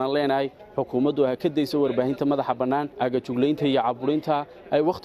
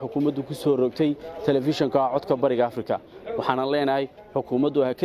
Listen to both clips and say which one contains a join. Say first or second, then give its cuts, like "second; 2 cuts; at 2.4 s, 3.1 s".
first; 1 cut; at 2.9 s